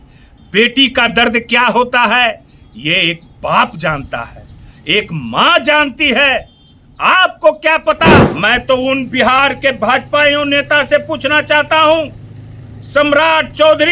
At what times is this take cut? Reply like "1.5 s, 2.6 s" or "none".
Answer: 8.3 s